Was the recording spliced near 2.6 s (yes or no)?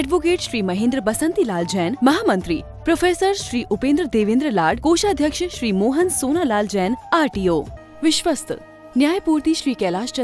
no